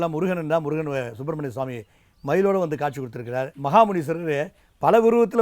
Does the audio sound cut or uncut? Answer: cut